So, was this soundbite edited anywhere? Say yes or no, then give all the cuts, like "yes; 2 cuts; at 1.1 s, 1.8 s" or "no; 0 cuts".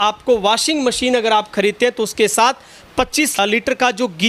yes; 1 cut; at 3.4 s